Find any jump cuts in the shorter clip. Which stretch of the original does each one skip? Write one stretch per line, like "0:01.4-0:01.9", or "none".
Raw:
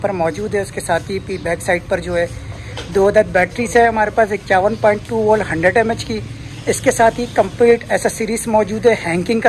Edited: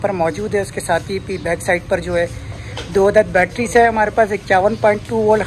none